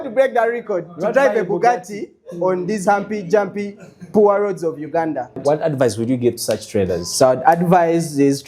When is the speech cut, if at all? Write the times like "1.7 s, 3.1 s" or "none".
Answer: 5.4 s